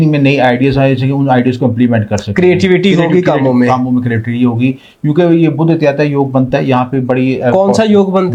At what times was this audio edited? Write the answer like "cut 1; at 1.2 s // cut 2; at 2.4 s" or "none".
none

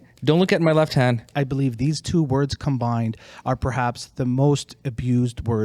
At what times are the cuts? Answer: cut 1; at 1.3 s

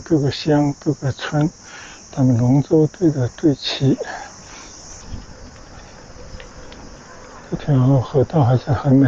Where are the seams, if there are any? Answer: cut 1; at 5.0 s

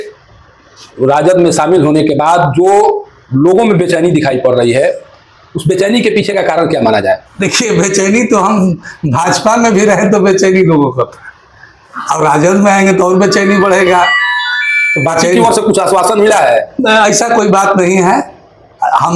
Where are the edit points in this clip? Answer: none

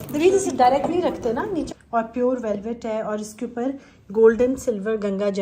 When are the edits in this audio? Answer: cut 1; at 1.7 s

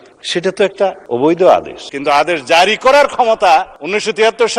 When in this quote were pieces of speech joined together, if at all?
cut 1; at 1.8 s

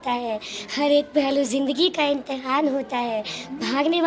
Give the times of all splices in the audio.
none

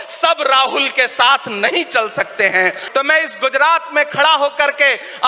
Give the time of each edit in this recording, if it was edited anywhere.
cut 1; at 2.8 s

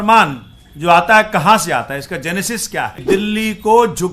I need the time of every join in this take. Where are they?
cut 1; at 3.0 s

